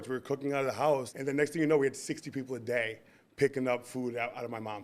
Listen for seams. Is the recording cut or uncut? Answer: cut